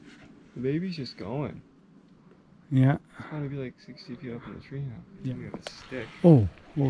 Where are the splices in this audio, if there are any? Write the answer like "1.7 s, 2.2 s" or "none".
5.1 s

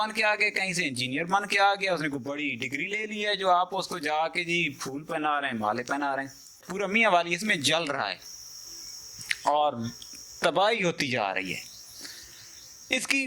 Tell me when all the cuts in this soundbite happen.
6.7 s

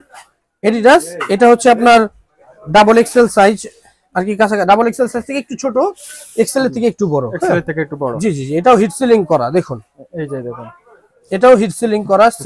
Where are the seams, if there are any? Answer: none

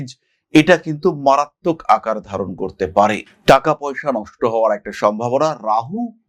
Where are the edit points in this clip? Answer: none

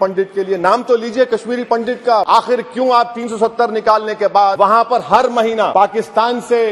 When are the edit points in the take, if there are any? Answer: 2.3 s, 4.5 s, 5.7 s

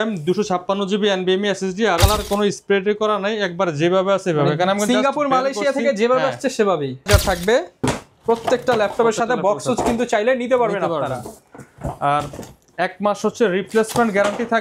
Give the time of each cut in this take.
2.0 s, 7.0 s

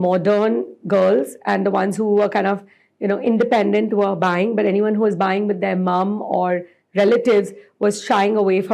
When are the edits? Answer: none

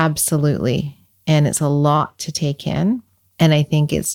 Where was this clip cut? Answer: 3.2 s

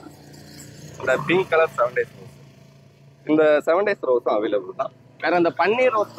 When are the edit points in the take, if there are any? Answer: none

